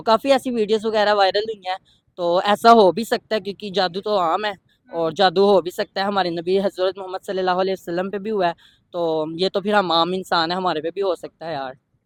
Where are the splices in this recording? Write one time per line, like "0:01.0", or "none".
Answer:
none